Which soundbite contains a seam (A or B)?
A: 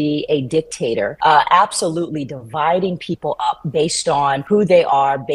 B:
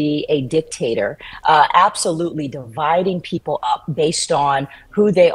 A